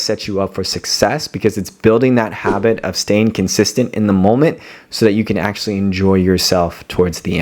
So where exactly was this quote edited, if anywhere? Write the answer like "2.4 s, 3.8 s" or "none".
none